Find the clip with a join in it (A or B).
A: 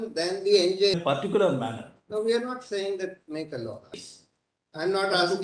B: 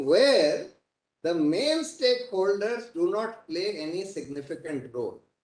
A